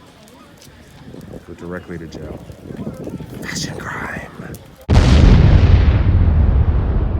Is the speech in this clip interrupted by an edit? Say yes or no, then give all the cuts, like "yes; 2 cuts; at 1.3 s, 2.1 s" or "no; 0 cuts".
yes; 1 cut; at 4.7 s